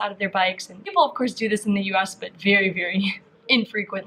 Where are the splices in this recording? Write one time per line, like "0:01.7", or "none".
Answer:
0:00.9